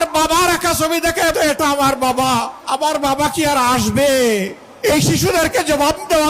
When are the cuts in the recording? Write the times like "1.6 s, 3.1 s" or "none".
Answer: 1.3 s, 2.6 s, 4.6 s